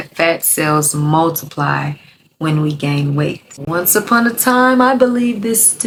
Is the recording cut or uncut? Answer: uncut